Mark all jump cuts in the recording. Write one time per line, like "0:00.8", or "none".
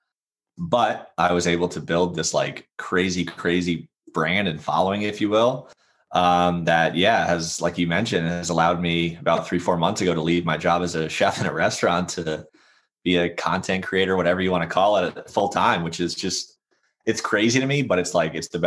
none